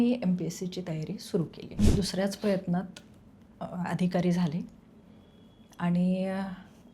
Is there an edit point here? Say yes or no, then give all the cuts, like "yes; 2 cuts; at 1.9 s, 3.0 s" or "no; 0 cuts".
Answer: yes; 1 cut; at 1.8 s